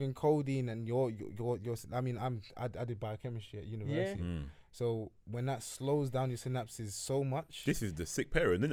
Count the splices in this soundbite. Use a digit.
0